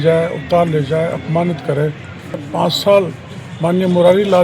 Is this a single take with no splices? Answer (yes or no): no